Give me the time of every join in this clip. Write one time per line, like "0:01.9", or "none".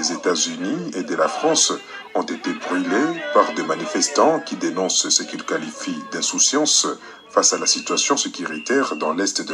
none

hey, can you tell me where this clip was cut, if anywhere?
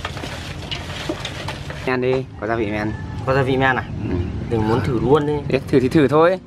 0:01.9

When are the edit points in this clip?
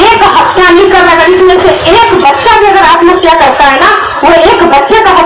none

